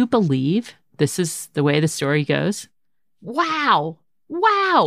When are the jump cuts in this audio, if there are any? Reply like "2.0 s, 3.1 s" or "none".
3.0 s

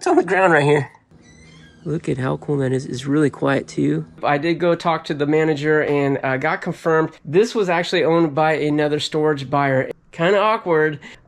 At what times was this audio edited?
1.0 s, 4.2 s, 9.9 s

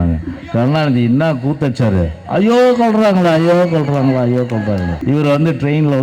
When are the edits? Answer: 5.0 s

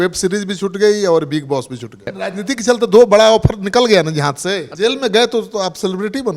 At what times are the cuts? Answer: 2.1 s, 4.7 s

